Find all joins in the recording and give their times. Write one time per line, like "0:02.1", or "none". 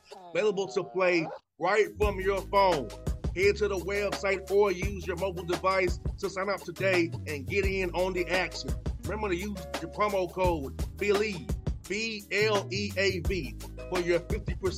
none